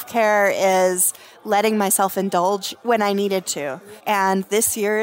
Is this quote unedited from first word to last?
no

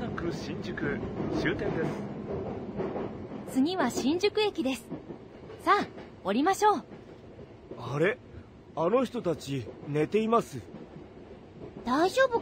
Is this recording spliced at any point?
no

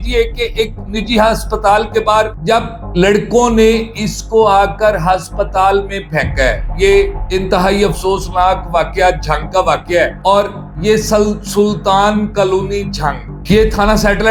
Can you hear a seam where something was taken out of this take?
no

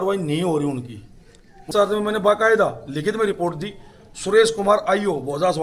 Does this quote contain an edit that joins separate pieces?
yes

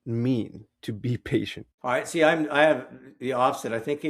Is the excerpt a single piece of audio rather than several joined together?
no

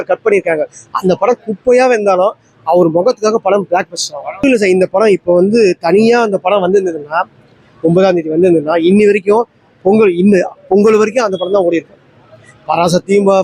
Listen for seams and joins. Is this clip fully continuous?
no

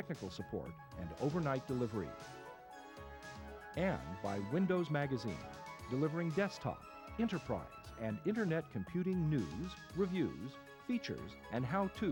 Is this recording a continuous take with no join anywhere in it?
yes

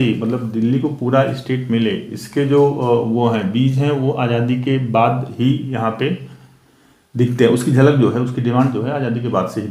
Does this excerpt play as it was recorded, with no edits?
yes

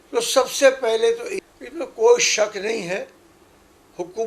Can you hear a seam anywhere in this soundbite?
yes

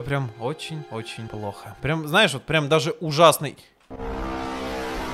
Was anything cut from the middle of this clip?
yes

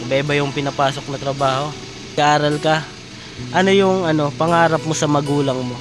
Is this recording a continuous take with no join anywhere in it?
no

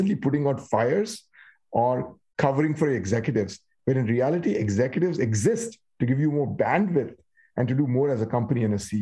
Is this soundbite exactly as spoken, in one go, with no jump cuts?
yes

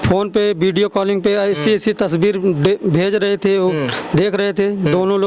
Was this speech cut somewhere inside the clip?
no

